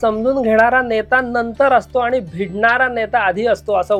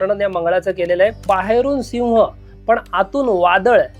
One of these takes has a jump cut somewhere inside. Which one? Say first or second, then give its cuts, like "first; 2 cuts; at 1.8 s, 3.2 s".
second; 1 cut; at 1.2 s